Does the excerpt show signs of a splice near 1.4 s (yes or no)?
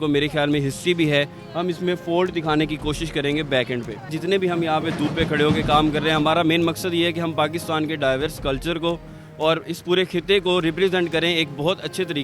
no